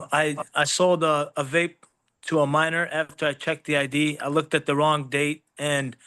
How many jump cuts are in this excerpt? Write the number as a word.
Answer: zero